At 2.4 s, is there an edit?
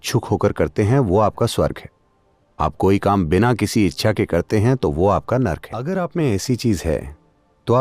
no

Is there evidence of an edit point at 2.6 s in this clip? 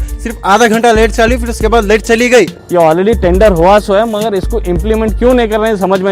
yes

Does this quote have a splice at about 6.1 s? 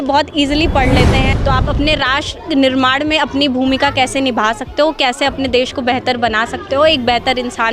no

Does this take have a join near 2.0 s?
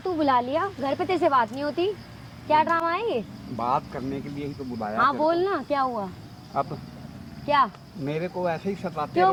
no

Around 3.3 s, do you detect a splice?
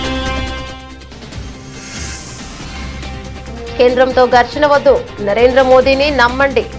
no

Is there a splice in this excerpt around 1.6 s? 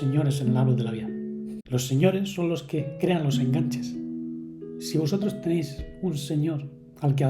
yes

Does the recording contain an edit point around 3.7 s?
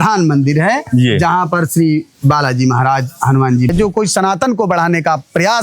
yes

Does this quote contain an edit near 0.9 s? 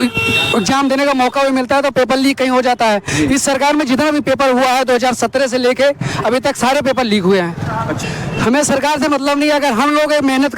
no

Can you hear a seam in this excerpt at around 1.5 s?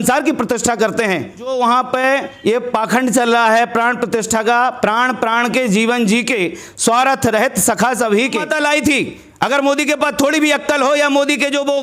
yes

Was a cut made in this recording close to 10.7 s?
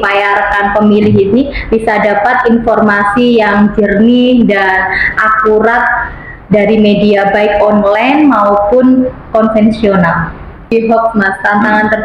yes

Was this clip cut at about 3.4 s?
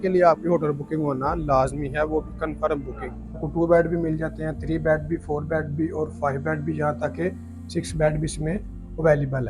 yes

